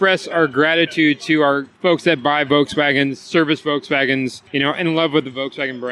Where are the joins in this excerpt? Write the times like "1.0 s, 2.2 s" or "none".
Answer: 1.7 s, 4.4 s